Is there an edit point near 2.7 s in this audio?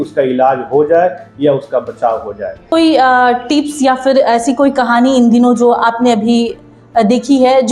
yes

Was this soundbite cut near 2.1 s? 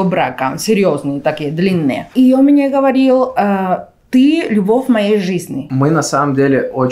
yes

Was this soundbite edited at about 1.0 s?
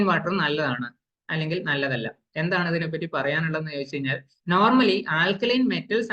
no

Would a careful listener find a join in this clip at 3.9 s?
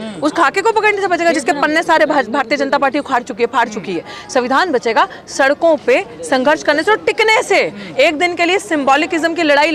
no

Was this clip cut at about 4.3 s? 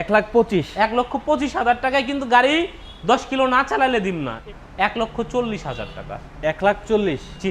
yes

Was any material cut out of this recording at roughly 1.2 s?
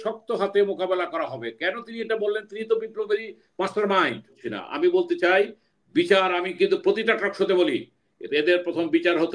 no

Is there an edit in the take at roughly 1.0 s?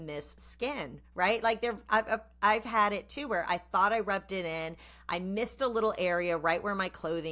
no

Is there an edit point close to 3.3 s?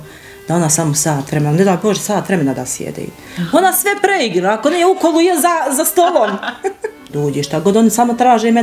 no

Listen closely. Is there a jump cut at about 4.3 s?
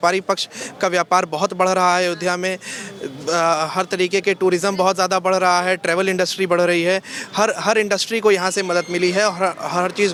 no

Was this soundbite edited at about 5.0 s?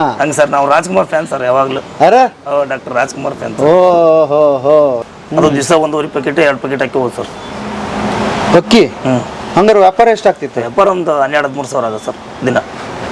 yes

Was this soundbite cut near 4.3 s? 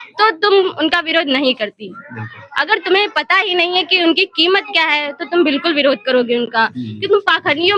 no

